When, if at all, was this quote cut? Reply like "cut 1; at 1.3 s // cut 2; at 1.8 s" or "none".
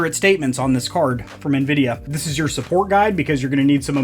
cut 1; at 2.0 s